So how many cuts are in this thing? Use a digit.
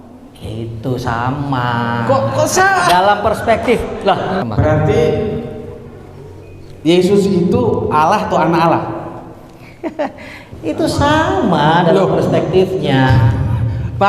1